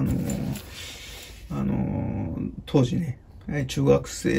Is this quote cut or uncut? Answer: uncut